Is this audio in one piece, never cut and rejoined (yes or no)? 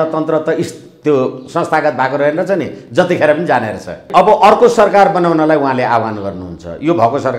no